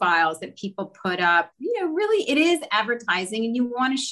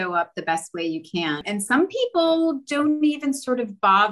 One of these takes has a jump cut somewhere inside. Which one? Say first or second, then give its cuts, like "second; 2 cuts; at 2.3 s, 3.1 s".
second; 1 cut; at 1.4 s